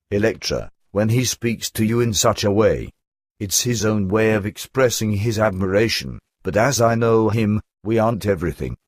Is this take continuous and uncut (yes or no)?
no